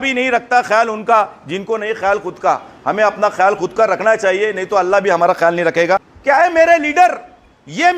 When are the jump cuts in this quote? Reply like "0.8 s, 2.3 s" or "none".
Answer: 6.1 s